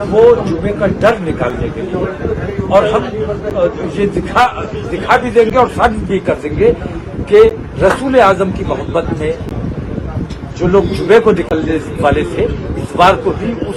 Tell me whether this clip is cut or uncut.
uncut